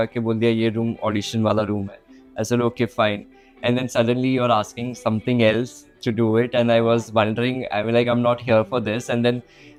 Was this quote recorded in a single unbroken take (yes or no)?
yes